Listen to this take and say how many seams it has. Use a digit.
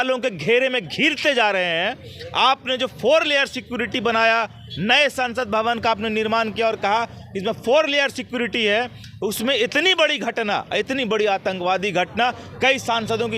0